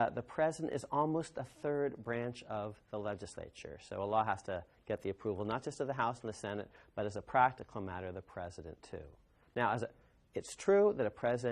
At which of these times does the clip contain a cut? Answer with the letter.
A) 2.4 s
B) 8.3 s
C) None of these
A